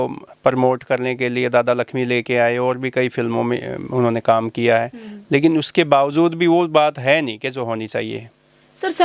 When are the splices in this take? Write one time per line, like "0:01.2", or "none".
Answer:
none